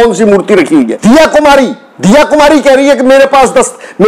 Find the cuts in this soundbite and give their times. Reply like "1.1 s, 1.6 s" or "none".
0.9 s